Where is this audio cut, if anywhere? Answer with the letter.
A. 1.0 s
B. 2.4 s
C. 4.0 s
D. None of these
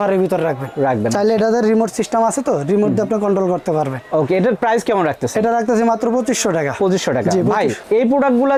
D